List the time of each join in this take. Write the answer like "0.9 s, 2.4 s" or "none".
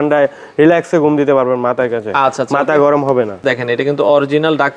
3.4 s